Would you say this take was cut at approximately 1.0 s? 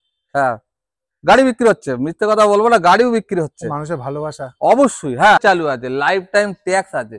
no; 1 cut; at 5.4 s

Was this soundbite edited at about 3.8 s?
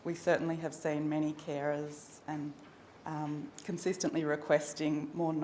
yes; 1 cut; at 3.8 s

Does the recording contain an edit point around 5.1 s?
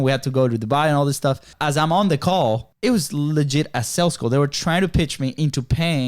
no; 2 cuts; at 1.5 s, 2.7 s

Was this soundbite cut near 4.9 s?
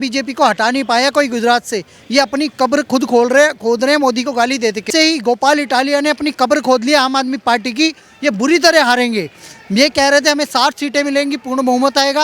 yes; 1 cut; at 4.9 s

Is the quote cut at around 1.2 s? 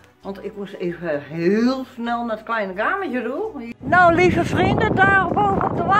no; 1 cut; at 3.7 s

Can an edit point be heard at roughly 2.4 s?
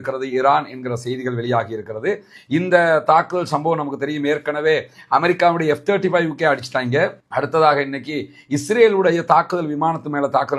no; 0 cuts

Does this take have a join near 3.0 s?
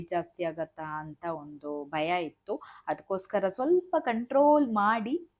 no; 0 cuts

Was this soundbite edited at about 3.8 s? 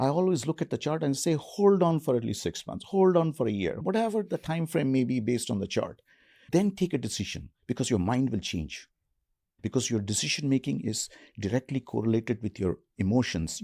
yes; 3 cuts; at 3.8 s, 6.5 s, 9.5 s

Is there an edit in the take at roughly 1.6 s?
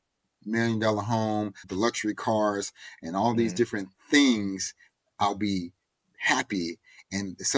yes; 1 cut; at 1.6 s

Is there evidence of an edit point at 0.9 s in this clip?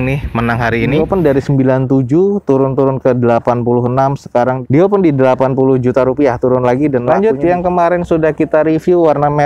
yes; 2 cuts; at 0.9 s, 7.1 s

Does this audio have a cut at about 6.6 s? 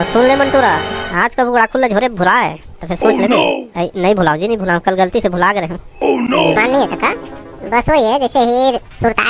yes; 1 cut; at 6.6 s

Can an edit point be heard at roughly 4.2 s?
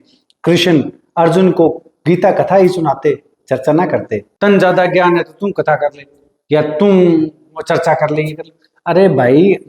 yes; 1 cut; at 4.2 s

